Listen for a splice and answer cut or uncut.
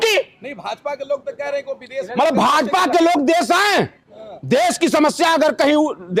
uncut